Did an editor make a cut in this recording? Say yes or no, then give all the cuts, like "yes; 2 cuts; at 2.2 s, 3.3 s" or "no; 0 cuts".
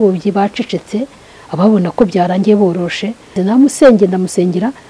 yes; 1 cut; at 3.4 s